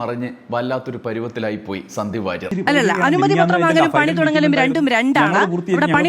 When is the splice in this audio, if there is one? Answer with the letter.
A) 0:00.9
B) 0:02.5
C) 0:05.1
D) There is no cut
B